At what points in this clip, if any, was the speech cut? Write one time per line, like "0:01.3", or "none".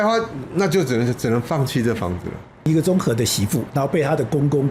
0:02.7

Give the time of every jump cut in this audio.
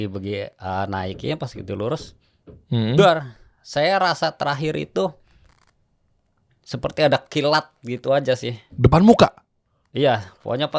none

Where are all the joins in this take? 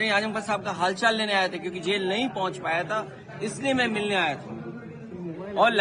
none

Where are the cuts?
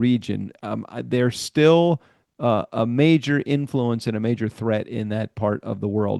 none

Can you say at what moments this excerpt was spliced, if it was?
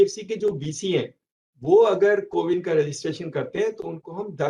none

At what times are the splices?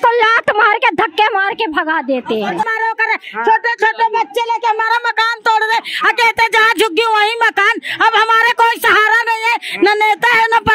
0:02.7

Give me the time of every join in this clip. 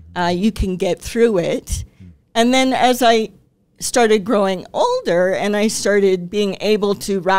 none

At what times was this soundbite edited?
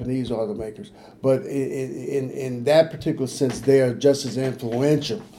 none

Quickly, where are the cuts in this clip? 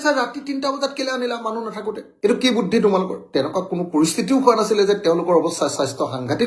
0:03.2

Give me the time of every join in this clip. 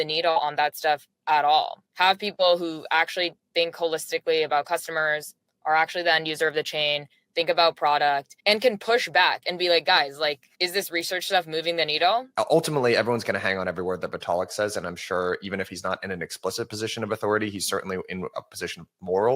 0:01.8
0:08.3
0:10.5
0:12.3
0:18.4

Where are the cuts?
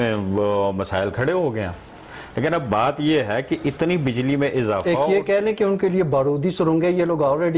none

